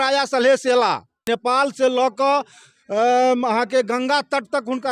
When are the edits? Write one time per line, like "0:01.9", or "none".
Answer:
0:01.2

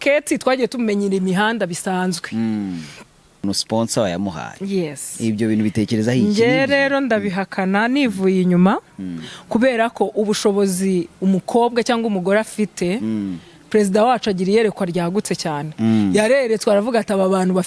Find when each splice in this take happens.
0:03.3

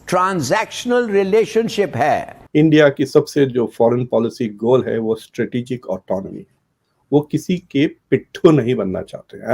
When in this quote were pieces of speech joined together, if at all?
0:02.3

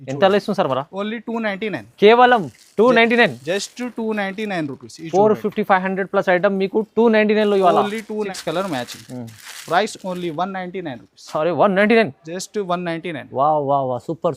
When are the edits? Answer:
0:08.3

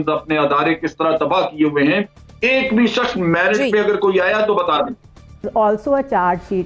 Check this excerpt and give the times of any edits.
0:05.5

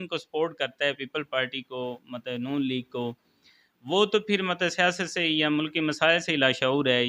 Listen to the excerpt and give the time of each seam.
none

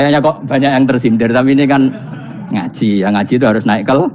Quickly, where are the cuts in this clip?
none

